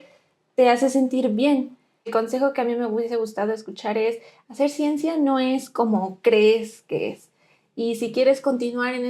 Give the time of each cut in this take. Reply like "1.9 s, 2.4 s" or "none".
2.1 s